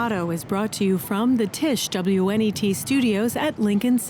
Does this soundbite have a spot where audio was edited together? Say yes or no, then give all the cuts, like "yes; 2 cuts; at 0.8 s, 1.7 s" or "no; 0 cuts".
no; 0 cuts